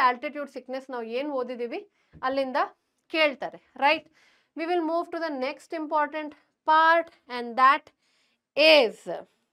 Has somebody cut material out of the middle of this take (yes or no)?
no